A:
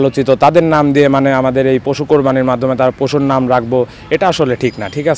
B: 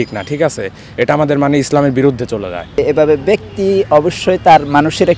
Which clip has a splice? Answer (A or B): B